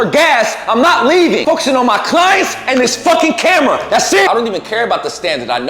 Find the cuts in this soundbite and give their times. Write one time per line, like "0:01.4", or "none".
0:04.3